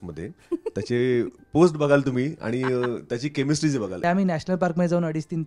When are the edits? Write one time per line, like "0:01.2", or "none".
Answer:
0:04.0

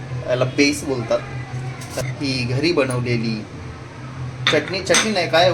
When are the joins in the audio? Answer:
0:02.0

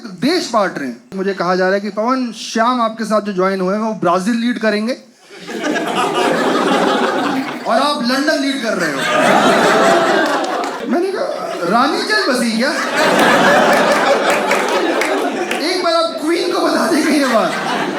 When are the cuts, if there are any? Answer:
0:01.2
0:10.8

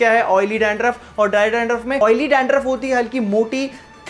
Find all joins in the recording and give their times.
0:02.0

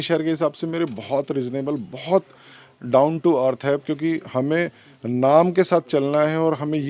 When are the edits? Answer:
none

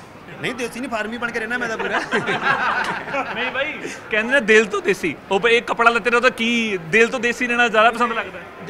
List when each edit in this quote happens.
none

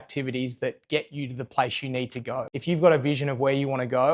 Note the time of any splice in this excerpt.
0:02.5

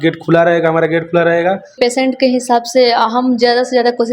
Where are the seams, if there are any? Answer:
0:01.7

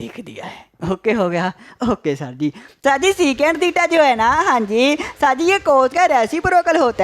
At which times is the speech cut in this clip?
0:02.7

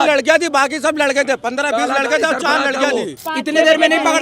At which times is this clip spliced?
0:03.3

